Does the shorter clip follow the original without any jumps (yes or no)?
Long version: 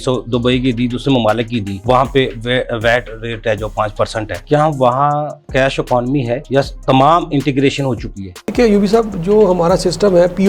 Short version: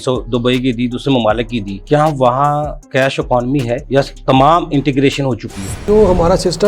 no